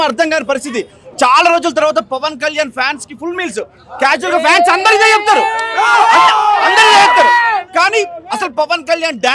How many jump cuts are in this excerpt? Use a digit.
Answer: 0